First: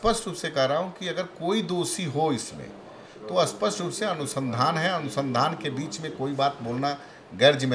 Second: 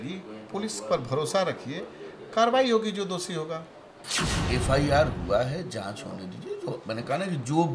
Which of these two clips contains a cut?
second; 1 cut; at 4.1 s

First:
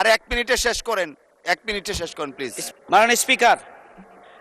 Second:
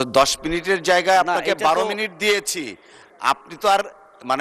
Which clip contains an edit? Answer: first; 1 cut; at 2.6 s

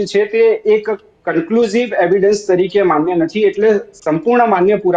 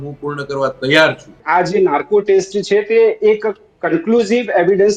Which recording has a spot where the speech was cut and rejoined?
second; 1 cut; at 1.4 s

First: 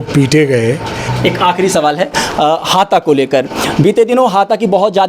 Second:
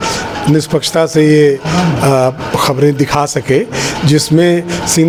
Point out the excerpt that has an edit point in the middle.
first; 1 cut; at 1.0 s

